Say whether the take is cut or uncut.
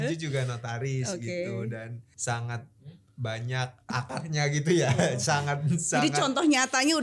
cut